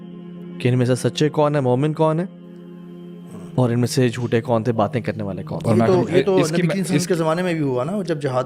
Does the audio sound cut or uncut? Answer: uncut